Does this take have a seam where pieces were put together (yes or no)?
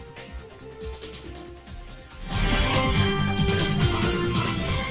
yes